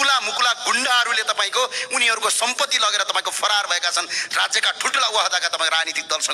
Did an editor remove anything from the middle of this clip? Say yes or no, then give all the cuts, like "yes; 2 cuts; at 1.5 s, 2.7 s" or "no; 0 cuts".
no; 0 cuts